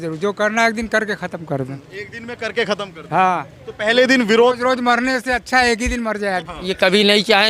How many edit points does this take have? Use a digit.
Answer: 1